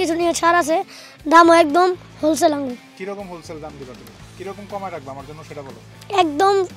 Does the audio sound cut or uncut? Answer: uncut